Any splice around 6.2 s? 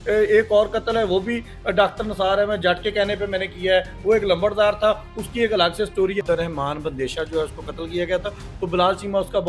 yes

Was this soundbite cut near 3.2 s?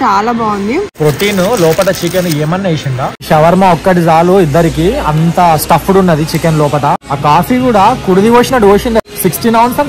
yes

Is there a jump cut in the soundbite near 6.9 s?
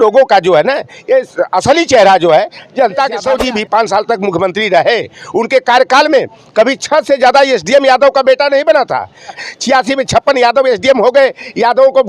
no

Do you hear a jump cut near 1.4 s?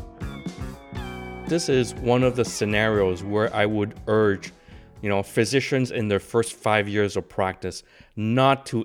yes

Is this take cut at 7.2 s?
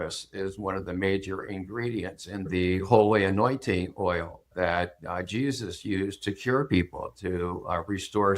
no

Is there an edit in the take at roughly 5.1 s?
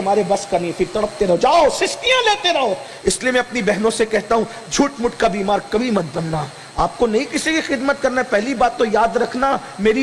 no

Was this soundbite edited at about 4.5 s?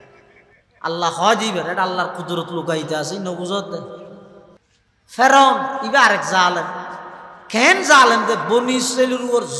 yes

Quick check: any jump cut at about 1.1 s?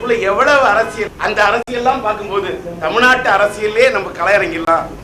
yes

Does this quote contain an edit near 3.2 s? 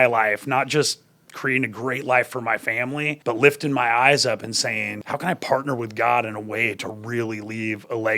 yes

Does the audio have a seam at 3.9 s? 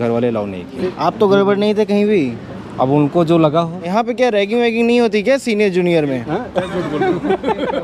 yes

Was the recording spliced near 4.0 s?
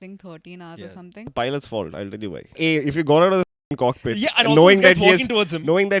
no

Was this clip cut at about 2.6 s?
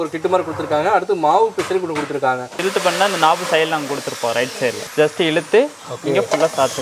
yes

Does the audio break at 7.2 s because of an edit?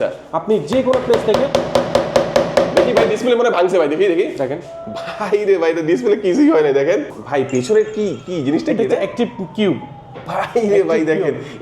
yes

